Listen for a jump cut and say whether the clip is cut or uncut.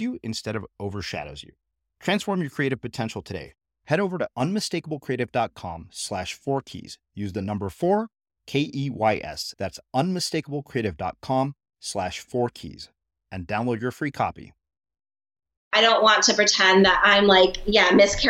cut